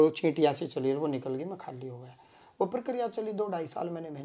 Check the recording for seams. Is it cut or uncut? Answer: uncut